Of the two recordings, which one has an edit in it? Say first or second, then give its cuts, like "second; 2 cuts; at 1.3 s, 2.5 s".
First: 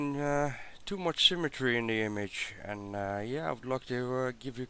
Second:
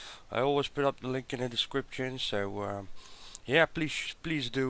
second; 1 cut; at 2.5 s